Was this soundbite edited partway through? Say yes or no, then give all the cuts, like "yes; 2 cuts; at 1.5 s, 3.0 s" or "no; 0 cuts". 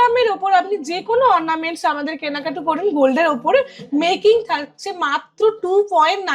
no; 0 cuts